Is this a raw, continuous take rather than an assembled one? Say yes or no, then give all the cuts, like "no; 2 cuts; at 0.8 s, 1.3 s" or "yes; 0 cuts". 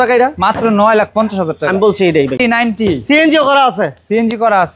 no; 1 cut; at 2.4 s